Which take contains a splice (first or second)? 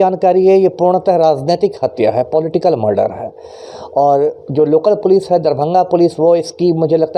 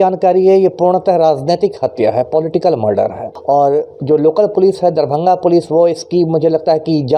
second